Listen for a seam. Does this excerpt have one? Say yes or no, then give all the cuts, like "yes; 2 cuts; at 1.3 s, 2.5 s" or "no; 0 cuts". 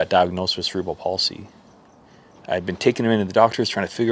no; 0 cuts